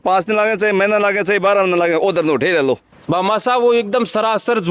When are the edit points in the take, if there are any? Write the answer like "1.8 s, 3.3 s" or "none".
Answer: 2.9 s